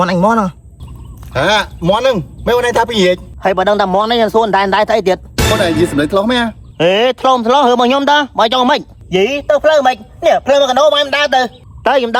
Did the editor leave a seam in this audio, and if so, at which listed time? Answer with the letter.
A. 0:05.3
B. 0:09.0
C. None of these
B